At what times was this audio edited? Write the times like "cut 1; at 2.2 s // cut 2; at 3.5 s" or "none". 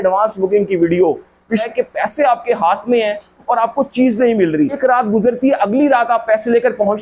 cut 1; at 1.7 s // cut 2; at 4.8 s

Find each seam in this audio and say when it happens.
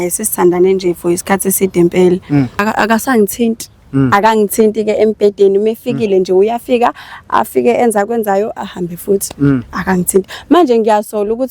cut 1; at 2.6 s

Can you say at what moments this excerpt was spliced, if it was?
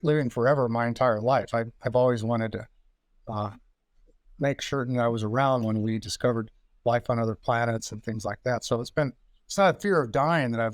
none

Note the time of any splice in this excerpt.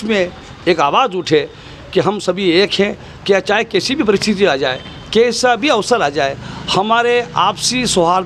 none

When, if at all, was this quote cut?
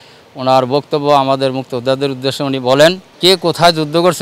cut 1; at 3.1 s

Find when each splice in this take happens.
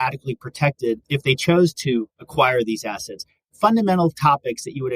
cut 1; at 1.0 s // cut 2; at 2.2 s

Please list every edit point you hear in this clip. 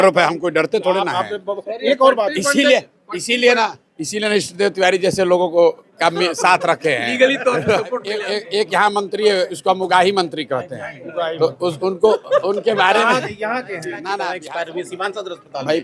cut 1; at 8.3 s // cut 2; at 14.3 s

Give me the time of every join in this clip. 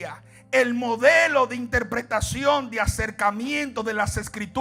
none

